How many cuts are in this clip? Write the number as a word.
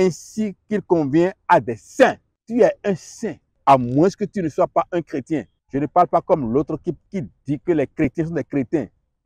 four